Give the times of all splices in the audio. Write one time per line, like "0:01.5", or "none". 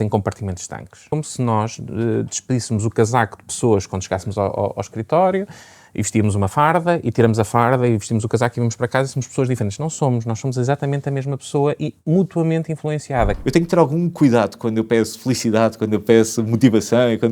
0:00.9
0:13.4

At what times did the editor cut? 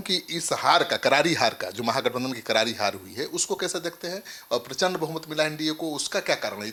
none

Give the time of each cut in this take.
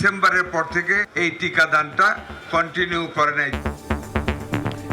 0:01.1
0:03.5

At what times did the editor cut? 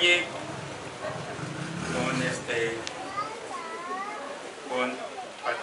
0:03.4

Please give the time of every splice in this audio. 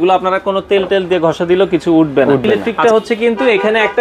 0:02.7

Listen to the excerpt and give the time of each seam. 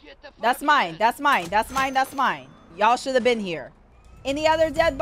none

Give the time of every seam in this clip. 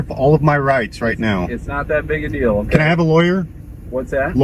none

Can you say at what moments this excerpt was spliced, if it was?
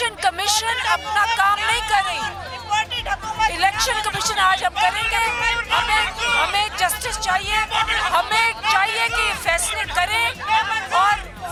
none

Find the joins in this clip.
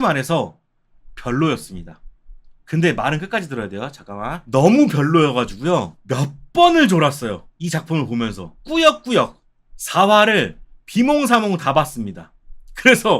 0:04.4
0:07.5
0:08.5

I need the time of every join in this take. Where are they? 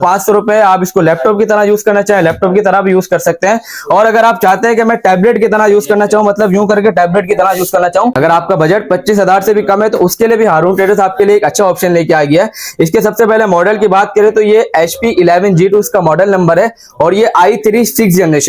0:08.2

